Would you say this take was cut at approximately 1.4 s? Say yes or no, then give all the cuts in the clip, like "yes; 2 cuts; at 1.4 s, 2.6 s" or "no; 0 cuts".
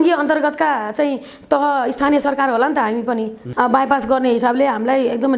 no; 1 cut; at 3.4 s